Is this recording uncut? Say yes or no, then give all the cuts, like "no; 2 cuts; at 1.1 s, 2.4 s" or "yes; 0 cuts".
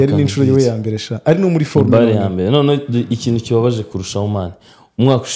yes; 0 cuts